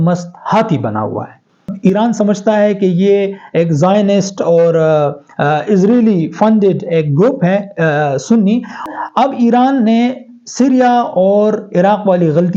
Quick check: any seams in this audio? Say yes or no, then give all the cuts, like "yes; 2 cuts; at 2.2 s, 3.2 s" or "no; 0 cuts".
yes; 2 cuts; at 1.7 s, 8.8 s